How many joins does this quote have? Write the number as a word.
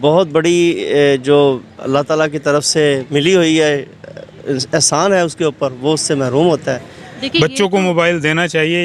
one